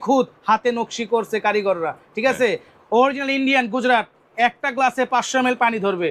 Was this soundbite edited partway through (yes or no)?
no